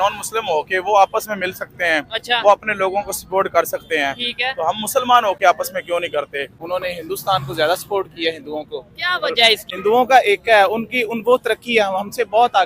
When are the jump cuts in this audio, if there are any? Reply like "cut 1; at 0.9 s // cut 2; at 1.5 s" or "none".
cut 1; at 6.5 s // cut 2; at 9.7 s